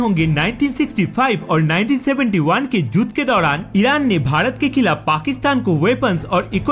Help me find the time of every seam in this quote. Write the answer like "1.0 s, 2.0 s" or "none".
none

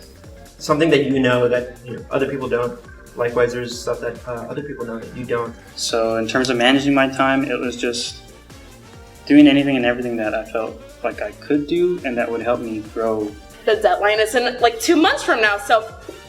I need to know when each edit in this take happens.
5.6 s, 13.4 s

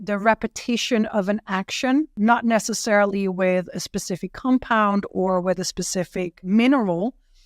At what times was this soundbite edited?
2.1 s, 6.4 s

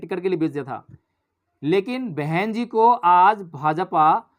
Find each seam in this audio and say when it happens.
none

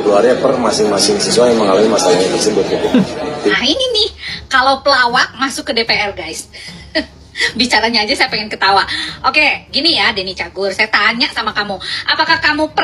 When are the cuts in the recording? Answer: 3.5 s

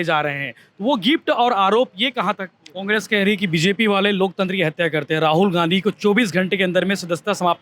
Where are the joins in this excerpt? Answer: 2.9 s

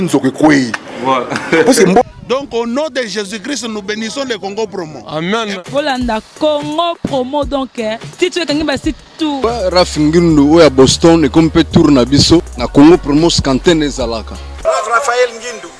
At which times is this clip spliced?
2.0 s, 9.4 s, 12.6 s, 14.5 s

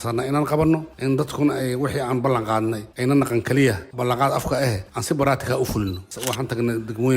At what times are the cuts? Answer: 6.1 s

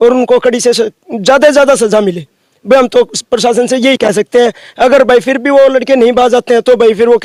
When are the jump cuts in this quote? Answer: none

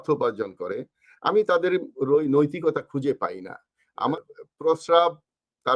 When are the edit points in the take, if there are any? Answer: 4.1 s

